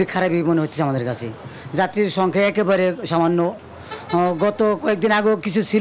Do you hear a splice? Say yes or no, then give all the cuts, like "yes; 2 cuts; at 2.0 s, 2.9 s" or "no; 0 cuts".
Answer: no; 0 cuts